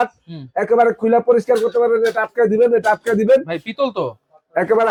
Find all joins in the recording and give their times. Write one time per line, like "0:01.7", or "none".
none